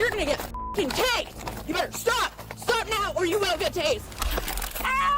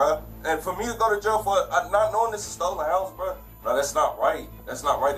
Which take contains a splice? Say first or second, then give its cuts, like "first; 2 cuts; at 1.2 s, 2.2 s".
first; 1 cut; at 4.3 s